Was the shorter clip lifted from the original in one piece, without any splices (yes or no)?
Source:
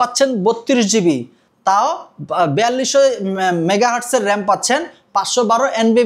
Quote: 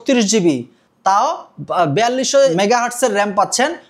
no